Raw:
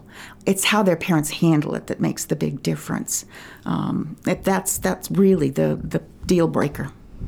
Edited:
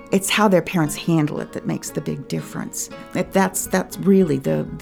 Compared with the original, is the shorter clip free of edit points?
no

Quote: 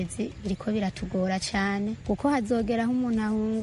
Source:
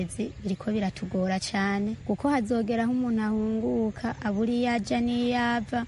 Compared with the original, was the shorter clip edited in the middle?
no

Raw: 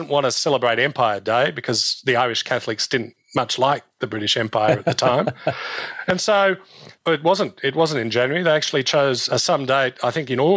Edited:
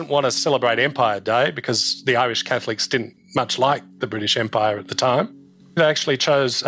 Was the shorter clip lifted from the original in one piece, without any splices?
no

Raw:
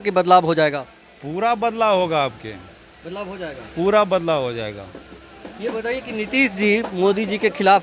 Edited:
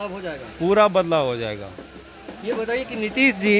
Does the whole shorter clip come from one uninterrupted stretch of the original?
yes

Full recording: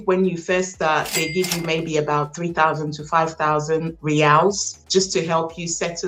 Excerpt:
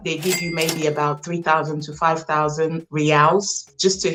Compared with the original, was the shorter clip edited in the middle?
no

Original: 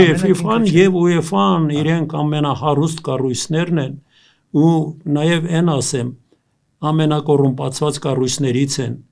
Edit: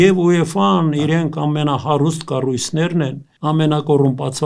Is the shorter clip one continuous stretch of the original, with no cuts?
no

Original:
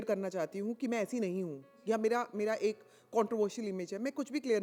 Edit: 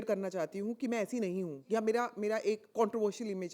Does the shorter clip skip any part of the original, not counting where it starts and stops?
yes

